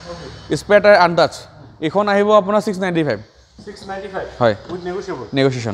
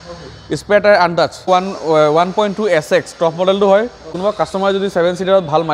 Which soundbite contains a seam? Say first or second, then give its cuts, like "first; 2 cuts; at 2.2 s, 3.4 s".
second; 2 cuts; at 1.5 s, 4.1 s